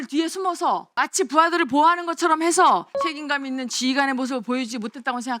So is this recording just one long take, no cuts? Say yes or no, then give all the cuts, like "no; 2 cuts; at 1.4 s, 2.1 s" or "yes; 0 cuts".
no; 2 cuts; at 0.9 s, 3.0 s